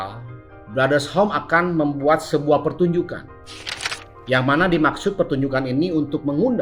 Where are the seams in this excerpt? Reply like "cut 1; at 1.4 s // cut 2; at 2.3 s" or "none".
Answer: none